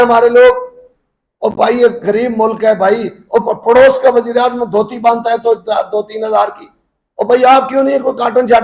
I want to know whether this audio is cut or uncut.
uncut